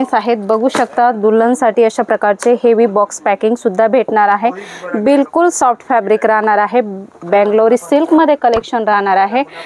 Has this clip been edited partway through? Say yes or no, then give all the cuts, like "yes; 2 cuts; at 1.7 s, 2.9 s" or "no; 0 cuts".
no; 0 cuts